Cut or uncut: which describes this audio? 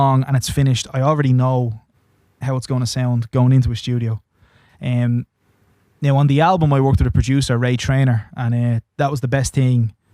uncut